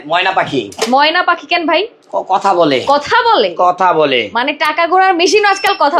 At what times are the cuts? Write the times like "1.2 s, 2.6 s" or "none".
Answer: none